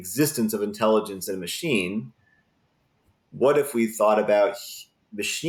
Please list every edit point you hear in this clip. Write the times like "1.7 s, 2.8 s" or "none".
none